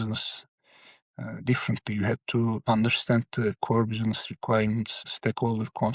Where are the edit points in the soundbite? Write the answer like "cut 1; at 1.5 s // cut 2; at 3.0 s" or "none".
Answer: cut 1; at 2.6 s // cut 2; at 5.0 s